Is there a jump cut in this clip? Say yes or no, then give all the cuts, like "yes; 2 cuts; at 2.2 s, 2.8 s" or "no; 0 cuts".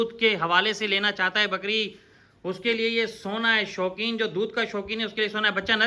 no; 0 cuts